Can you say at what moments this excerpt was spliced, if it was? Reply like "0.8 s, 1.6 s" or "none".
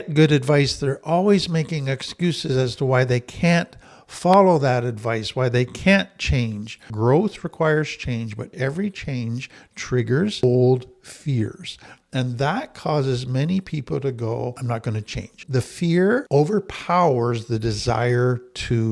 6.8 s, 8.5 s, 14.6 s, 16.3 s